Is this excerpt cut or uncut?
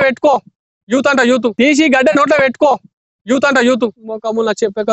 cut